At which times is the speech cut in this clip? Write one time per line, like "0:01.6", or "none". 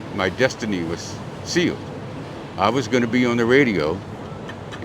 none